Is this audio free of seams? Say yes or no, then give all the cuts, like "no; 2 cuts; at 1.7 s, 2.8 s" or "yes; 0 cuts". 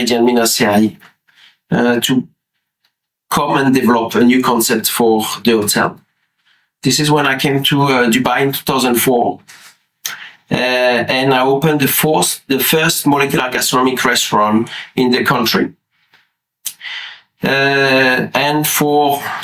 yes; 0 cuts